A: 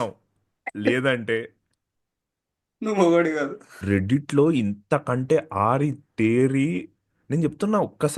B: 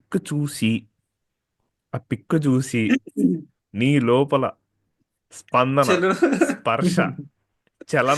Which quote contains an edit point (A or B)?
A